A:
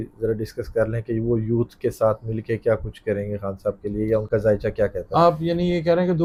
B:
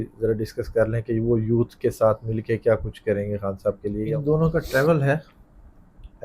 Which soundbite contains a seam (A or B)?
B